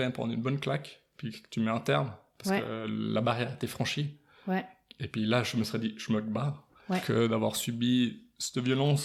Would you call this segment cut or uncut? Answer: uncut